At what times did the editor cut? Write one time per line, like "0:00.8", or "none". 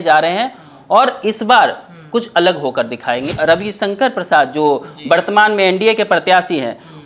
0:03.3

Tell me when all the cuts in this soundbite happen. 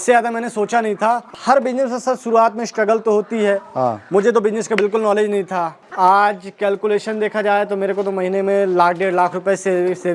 0:01.2
0:05.8

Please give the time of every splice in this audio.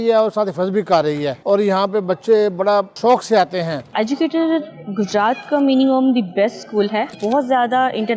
0:01.4
0:03.9
0:07.1

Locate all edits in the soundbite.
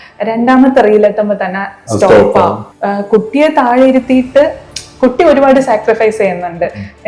0:02.7

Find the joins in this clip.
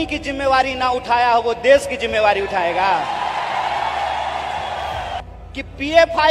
0:05.2

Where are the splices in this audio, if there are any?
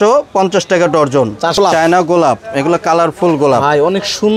0:01.6

